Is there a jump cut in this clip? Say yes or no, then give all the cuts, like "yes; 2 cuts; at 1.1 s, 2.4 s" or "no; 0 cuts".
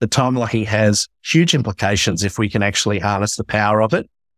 no; 0 cuts